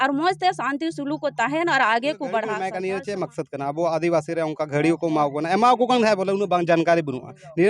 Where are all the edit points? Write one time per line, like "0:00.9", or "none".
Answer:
0:02.7